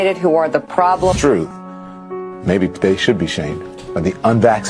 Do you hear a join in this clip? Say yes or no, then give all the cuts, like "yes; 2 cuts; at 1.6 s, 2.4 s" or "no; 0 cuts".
no; 0 cuts